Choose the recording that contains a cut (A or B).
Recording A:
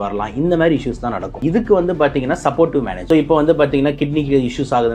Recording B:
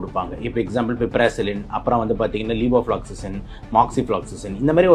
A